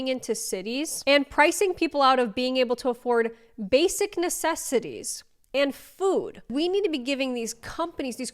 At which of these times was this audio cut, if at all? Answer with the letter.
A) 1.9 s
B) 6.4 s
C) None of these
B